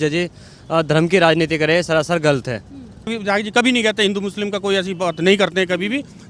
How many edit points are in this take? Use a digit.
1